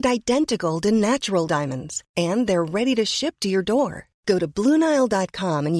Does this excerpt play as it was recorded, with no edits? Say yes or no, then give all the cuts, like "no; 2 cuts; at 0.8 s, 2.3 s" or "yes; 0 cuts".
yes; 0 cuts